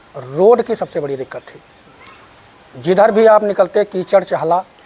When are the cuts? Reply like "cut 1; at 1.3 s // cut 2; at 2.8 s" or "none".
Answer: none